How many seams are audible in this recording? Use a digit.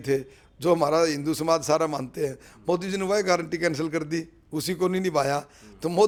0